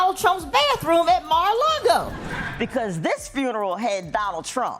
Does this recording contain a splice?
yes; 1 cut; at 2.2 s

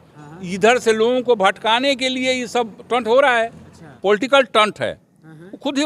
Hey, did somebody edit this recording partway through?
yes; 1 cut; at 3.9 s

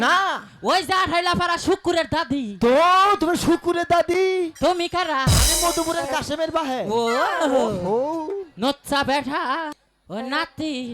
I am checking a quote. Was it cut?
yes; 1 cut; at 9.7 s

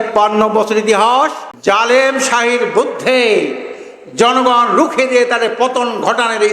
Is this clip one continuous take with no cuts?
no; 1 cut; at 1.5 s

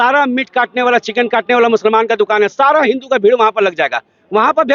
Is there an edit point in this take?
no; 0 cuts

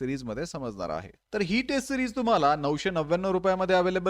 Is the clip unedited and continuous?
no; 1 cut; at 1.1 s

